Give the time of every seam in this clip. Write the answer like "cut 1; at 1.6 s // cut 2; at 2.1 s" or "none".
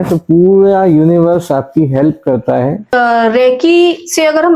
cut 1; at 2.9 s